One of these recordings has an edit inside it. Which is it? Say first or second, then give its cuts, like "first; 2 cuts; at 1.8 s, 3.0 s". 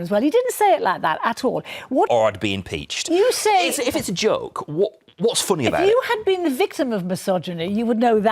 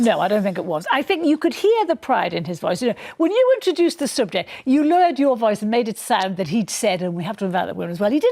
first; 1 cut; at 2.1 s